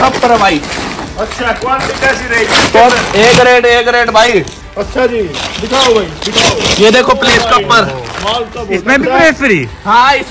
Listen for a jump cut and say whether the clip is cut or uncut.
uncut